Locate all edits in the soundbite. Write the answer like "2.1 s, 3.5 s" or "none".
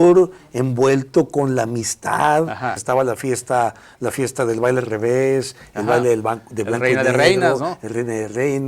2.8 s